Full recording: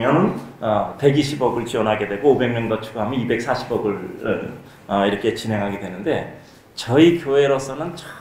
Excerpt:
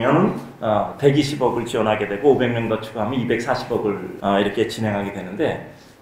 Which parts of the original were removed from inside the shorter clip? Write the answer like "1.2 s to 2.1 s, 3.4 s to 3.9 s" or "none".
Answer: 4.1 s to 4.8 s